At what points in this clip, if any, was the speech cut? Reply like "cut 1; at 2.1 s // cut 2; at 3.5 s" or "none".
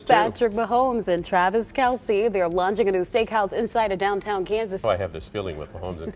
cut 1; at 4.8 s